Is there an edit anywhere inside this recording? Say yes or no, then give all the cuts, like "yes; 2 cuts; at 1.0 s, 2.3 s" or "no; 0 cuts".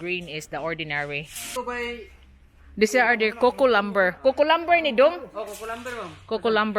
yes; 1 cut; at 1.4 s